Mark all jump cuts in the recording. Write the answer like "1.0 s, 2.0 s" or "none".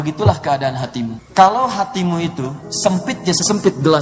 1.2 s